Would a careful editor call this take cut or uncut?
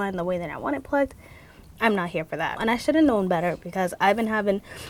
cut